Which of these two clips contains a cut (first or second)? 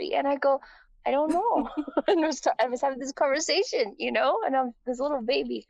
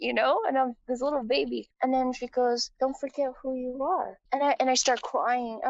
second